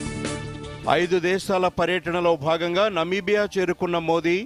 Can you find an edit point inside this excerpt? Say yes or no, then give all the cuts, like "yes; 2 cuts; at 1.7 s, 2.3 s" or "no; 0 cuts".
no; 0 cuts